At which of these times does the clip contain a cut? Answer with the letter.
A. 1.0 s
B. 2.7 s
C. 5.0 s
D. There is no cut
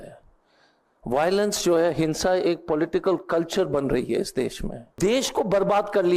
C